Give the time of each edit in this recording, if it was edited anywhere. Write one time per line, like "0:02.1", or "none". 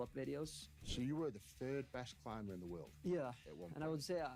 0:01.0

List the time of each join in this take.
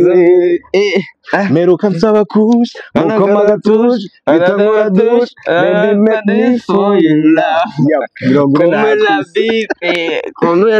none

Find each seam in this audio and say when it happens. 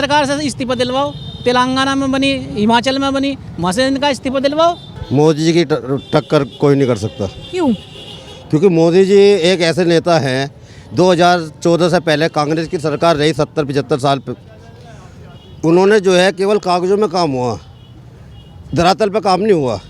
0:04.9

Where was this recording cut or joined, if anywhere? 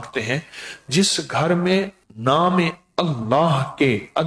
0:02.0

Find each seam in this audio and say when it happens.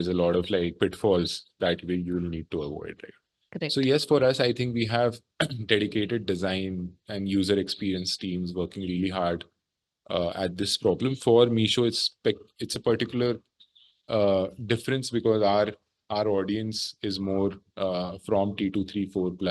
none

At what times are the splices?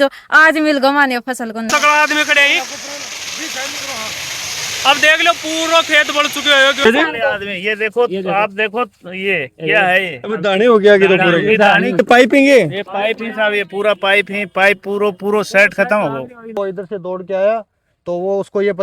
0:01.7
0:06.8
0:12.0
0:16.5

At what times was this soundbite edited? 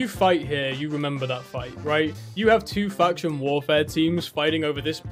none

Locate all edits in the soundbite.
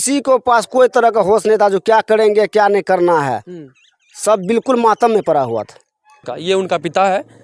0:06.3

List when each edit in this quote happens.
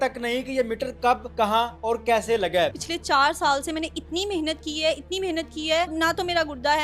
0:01.3
0:02.8
0:05.9

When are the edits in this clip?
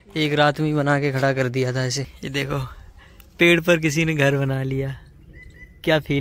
0:02.1

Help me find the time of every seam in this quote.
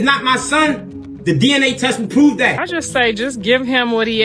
0:02.3

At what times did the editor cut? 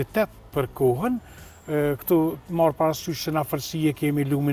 none

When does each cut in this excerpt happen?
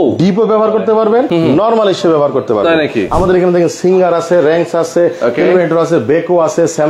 0:01.3
0:03.1

